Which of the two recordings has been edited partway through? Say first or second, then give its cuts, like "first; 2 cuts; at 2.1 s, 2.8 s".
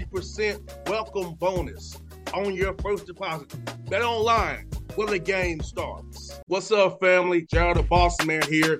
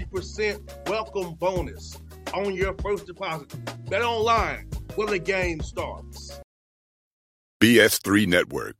second; 1 cut; at 6.4 s